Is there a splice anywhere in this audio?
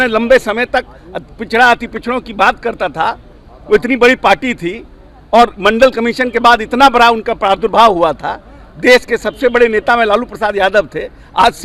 no; 0 cuts

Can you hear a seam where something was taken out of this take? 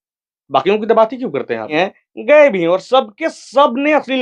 yes; 1 cut; at 1.7 s

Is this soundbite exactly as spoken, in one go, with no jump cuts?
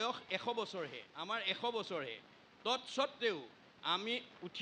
no; 1 cut; at 1.1 s

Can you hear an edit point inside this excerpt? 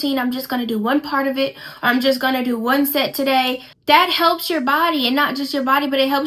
yes; 1 cut; at 3.7 s

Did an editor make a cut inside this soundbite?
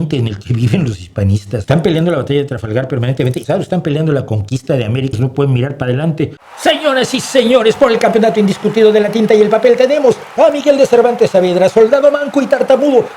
yes; 4 cuts; at 1.6 s, 3.4 s, 5.2 s, 6.4 s

